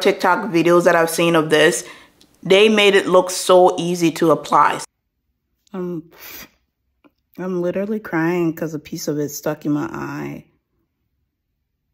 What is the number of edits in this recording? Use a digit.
2